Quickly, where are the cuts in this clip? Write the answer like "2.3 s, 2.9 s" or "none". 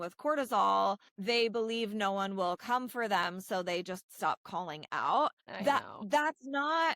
1.1 s, 5.5 s